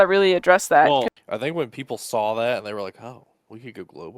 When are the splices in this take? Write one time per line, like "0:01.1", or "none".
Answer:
0:01.2

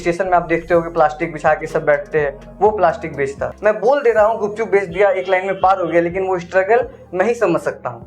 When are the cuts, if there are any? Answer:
0:03.5

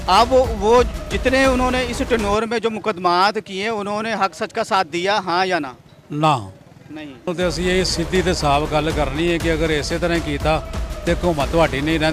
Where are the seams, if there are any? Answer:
0:07.3

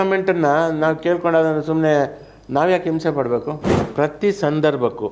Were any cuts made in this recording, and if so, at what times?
0:03.8

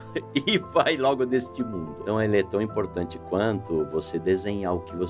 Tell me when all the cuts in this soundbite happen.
0:01.9

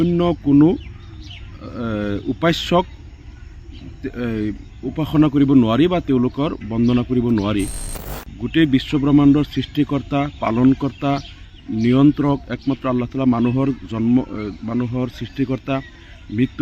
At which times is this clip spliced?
0:08.2

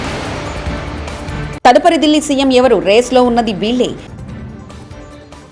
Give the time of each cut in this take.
0:01.5

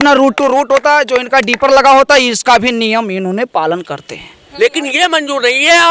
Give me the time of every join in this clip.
0:04.4

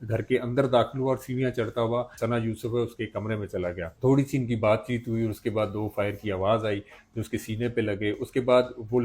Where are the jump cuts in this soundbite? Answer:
0:02.1
0:03.9

